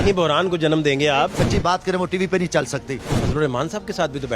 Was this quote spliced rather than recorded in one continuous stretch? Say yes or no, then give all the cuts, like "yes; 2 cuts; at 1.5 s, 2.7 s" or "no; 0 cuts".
yes; 2 cuts; at 1.3 s, 3.1 s